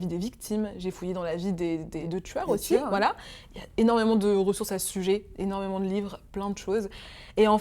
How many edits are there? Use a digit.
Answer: 1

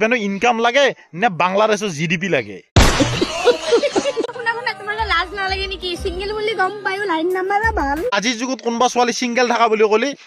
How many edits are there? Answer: 1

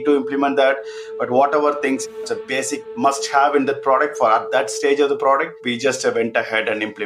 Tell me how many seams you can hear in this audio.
0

